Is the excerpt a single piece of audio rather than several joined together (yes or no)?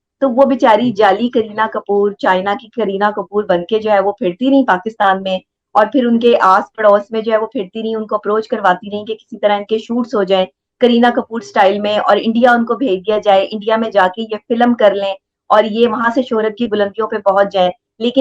yes